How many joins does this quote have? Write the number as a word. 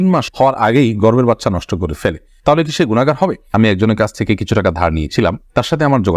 one